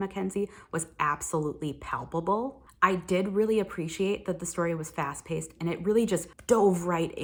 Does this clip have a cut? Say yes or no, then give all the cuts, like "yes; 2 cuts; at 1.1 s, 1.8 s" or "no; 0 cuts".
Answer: no; 0 cuts